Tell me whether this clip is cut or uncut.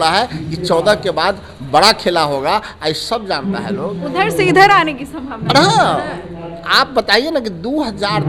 uncut